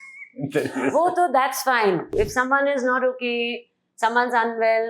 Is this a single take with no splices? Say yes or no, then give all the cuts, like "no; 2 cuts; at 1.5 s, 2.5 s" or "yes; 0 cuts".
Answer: no; 1 cut; at 2.1 s